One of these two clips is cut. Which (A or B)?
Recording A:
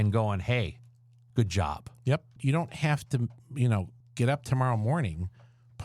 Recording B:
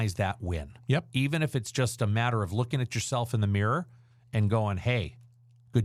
A